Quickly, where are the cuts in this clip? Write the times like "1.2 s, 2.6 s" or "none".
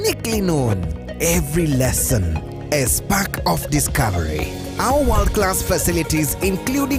none